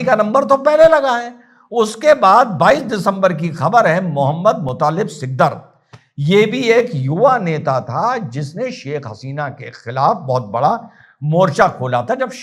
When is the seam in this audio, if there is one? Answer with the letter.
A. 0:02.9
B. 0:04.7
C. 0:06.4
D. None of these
D